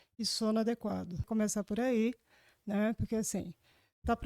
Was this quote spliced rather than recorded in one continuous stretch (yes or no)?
yes